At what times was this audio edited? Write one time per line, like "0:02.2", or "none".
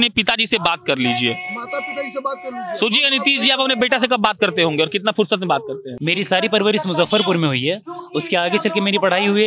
0:05.9